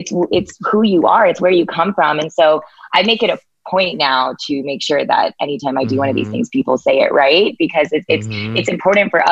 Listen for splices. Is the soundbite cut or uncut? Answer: uncut